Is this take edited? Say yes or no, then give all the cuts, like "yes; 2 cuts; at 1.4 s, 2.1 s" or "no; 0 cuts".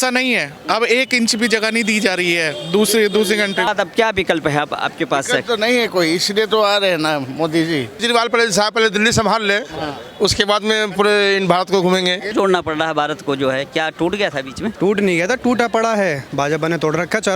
yes; 5 cuts; at 3.7 s, 8.0 s, 12.3 s, 14.7 s, 16.2 s